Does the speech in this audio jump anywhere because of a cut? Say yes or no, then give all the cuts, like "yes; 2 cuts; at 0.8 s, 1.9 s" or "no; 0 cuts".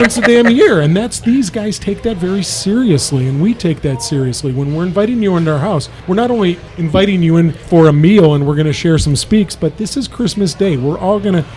no; 0 cuts